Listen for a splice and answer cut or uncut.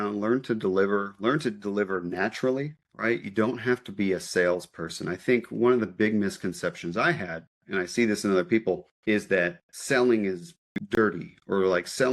uncut